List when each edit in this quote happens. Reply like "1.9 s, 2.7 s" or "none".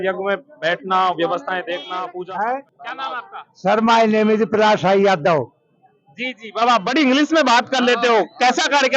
1.9 s

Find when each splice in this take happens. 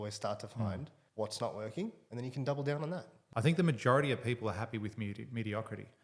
1.0 s, 2.0 s, 3.1 s

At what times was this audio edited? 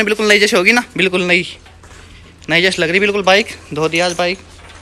1.8 s

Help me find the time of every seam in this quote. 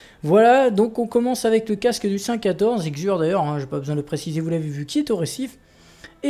1.1 s

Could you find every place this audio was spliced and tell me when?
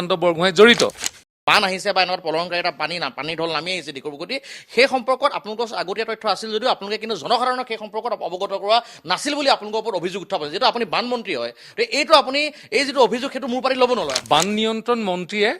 1.3 s, 14.2 s

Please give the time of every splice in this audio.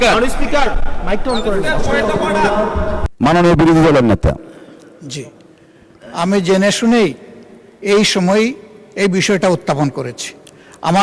3.1 s

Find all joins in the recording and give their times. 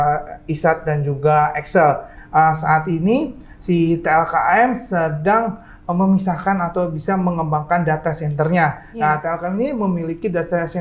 2.1 s

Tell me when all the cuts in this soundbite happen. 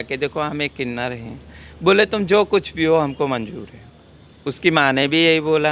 none

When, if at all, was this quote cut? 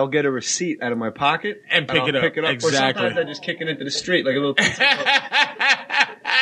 none

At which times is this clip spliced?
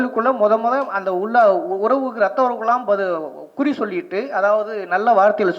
none

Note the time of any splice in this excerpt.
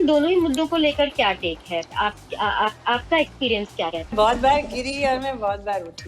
4.1 s

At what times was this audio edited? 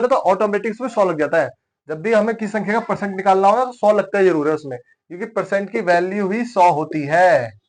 none

